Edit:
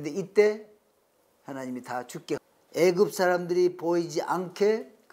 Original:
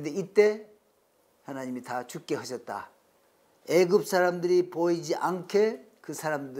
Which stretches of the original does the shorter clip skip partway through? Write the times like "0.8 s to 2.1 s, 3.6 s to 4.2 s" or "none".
2.4 s to 3.4 s